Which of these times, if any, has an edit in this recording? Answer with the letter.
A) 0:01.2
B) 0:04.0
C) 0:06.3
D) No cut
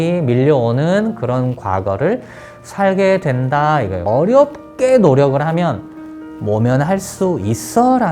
B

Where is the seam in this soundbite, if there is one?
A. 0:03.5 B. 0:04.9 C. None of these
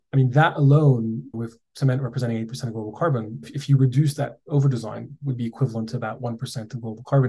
A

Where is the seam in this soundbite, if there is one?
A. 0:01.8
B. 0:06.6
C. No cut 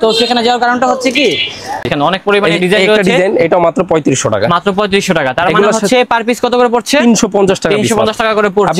A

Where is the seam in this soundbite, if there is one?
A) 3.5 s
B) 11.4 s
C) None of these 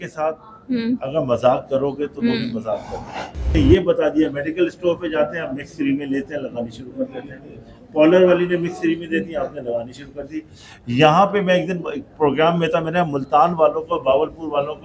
A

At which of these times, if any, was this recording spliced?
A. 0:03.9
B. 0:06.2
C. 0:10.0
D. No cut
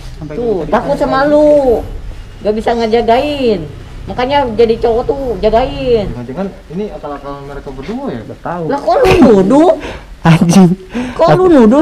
B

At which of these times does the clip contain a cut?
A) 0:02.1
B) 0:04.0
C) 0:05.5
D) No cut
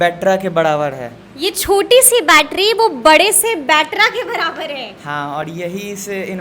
D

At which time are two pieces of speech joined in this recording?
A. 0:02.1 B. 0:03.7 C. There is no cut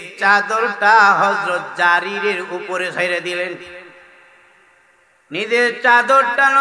C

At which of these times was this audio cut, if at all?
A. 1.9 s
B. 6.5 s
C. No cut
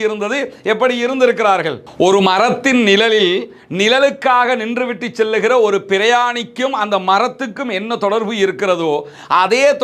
A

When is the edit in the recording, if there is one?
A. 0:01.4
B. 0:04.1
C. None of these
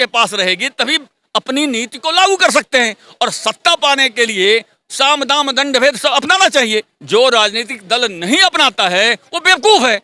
C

